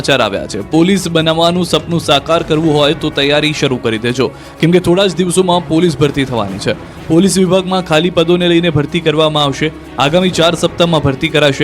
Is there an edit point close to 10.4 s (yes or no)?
yes